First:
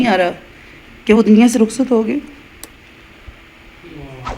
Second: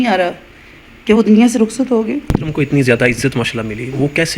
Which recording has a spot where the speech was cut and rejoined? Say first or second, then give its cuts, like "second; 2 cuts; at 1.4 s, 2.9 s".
second; 1 cut; at 2.3 s